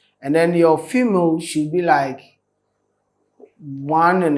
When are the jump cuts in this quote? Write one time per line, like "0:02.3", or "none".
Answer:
none